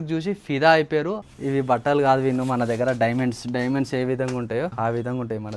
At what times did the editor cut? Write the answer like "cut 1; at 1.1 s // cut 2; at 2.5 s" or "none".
cut 1; at 1.2 s // cut 2; at 4.7 s